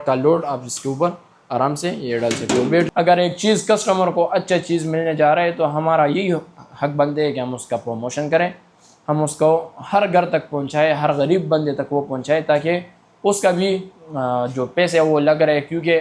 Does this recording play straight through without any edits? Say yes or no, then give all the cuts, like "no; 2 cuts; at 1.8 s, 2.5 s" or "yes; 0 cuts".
no; 1 cut; at 2.9 s